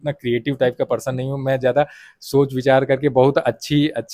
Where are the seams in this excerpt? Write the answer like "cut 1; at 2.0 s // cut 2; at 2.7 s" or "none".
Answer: none